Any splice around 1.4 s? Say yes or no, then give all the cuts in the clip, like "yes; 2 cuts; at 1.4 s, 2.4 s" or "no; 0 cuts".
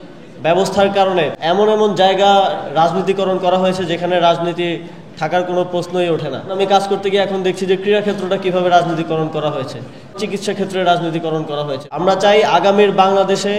yes; 4 cuts; at 1.4 s, 6.5 s, 10.2 s, 11.8 s